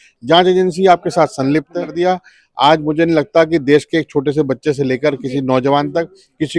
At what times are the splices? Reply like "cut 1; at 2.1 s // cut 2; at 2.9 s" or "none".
cut 1; at 1.9 s